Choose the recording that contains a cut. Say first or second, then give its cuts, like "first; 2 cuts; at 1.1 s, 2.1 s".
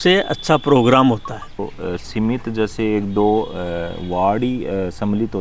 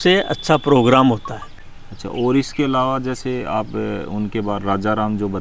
first; 1 cut; at 1.7 s